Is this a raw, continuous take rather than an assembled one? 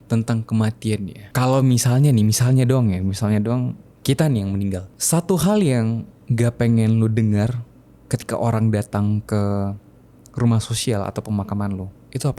no; 2 cuts; at 1.2 s, 4.9 s

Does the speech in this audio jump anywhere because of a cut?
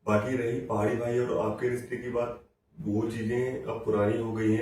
no; 0 cuts

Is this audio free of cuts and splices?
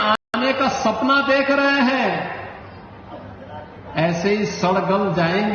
yes; 0 cuts

